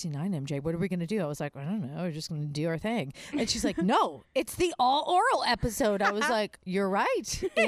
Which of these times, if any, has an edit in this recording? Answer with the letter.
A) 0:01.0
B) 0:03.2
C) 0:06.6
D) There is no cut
D